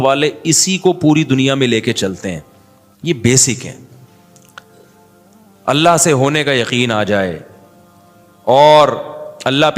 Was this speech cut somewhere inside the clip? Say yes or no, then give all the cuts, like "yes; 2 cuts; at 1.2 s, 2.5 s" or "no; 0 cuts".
no; 0 cuts